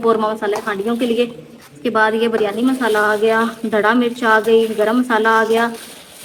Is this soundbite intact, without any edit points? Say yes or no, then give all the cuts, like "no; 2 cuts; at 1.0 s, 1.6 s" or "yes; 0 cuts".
yes; 0 cuts